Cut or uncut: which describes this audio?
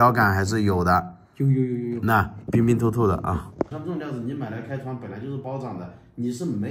cut